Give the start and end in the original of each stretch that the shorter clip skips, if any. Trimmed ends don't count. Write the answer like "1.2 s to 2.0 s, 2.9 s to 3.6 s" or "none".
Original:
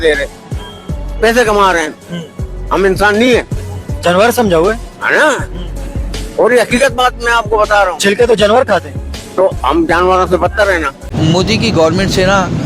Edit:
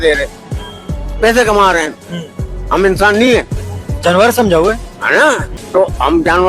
5.5 s to 9.2 s

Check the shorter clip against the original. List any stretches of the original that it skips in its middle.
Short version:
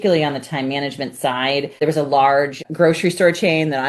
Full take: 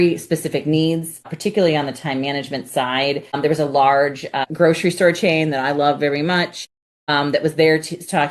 3.3 s to 3.4 s, 4.3 s to 4.4 s

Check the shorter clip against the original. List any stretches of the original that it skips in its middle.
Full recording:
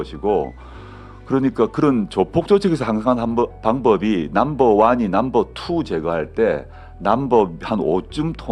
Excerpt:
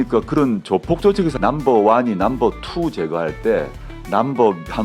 2.8 s to 4.3 s

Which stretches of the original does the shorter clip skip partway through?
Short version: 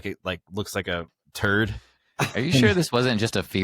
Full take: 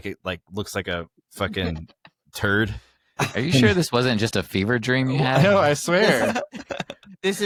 1.2 s to 2.2 s

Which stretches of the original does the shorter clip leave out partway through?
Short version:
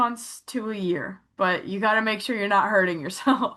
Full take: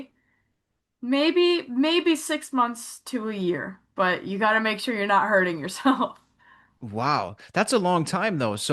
none

